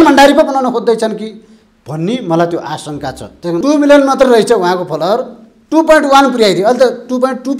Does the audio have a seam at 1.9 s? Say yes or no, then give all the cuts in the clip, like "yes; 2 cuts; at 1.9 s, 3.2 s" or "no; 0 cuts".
no; 1 cut; at 3.6 s